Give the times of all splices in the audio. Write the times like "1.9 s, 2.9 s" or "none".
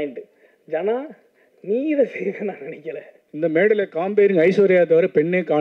3.2 s